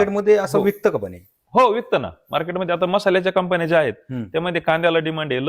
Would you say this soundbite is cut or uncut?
uncut